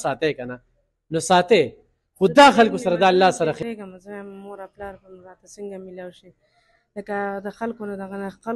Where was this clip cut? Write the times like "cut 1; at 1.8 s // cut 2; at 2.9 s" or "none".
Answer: cut 1; at 3.6 s